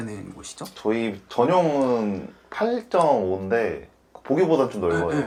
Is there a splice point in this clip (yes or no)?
no